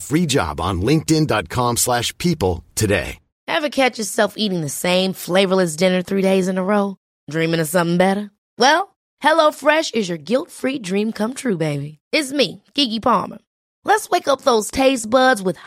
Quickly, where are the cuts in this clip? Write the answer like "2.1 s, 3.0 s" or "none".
3.4 s